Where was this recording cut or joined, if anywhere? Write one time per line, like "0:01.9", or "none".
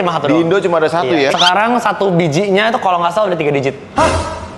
0:01.3